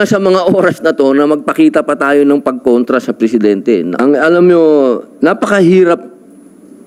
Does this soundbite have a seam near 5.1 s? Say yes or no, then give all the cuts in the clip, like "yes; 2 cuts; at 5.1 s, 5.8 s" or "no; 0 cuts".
no; 1 cut; at 3.9 s